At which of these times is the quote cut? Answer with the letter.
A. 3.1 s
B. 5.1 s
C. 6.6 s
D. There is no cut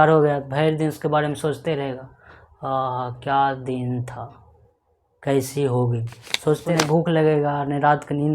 C